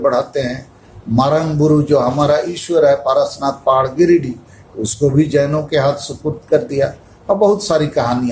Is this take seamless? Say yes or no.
yes